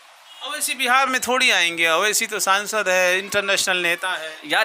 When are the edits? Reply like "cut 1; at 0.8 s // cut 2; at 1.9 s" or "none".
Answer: none

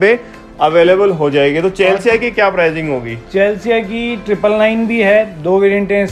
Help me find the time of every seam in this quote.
none

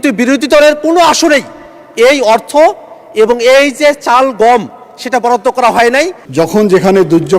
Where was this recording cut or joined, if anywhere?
cut 1; at 6.2 s

